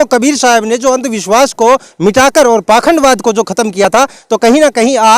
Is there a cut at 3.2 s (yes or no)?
no